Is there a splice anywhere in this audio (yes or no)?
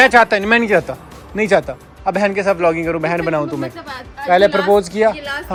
no